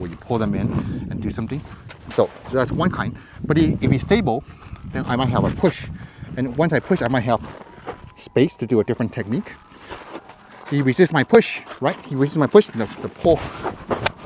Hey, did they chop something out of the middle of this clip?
no; 0 cuts

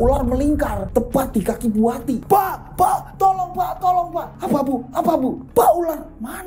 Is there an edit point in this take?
yes; 3 cuts; at 2.2 s, 4.3 s, 5.4 s

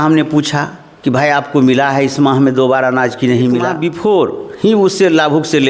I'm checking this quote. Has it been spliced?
yes; 1 cut; at 4.0 s

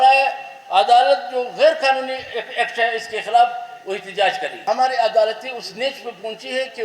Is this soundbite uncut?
no; 1 cut; at 4.5 s

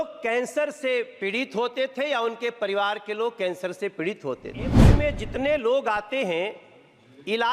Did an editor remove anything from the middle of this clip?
yes; 1 cut; at 4.9 s

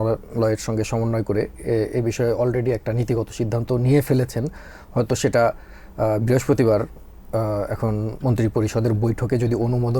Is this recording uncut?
yes; 0 cuts

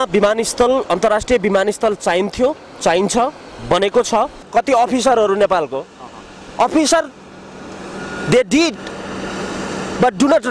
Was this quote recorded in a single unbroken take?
no; 1 cut; at 4.5 s

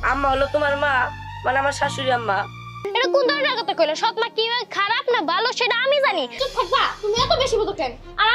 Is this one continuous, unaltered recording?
no; 2 cuts; at 2.8 s, 6.4 s

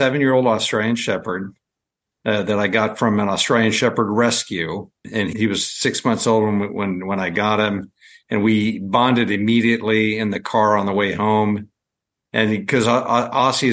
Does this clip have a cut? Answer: yes; 1 cut; at 5.1 s

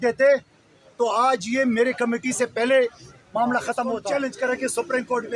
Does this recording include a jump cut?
yes; 1 cut; at 4.0 s

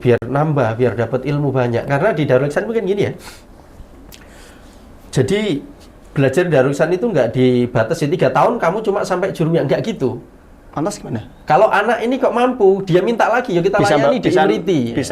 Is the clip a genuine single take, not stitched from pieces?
yes; 0 cuts

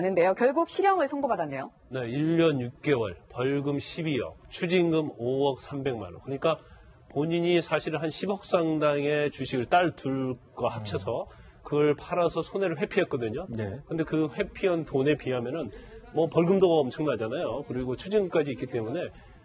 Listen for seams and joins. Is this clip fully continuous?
yes; 0 cuts

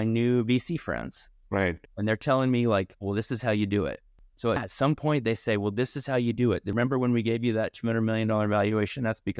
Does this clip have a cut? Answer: no; 0 cuts

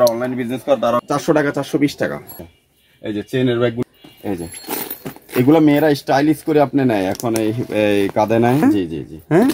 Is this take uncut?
no; 4 cuts; at 1.1 s, 2.5 s, 3.8 s, 8.6 s

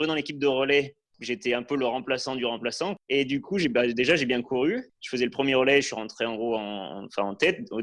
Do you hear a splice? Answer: yes; 2 cuts; at 1.1 s, 2.9 s

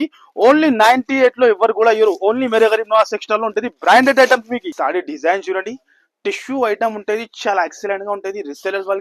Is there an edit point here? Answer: yes; 1 cut; at 4.7 s

